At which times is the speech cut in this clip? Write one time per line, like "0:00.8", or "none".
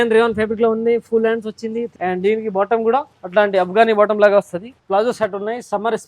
0:01.9
0:03.2
0:04.7